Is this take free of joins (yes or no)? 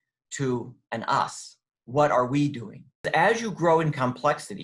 no